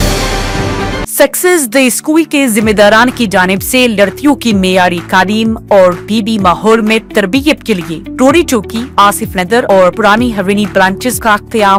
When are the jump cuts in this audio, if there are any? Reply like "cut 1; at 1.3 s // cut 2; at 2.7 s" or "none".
none

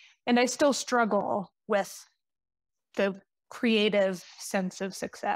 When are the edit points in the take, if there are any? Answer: cut 1; at 2.6 s

